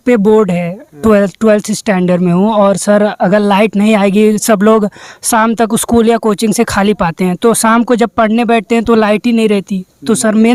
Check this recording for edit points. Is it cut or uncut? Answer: uncut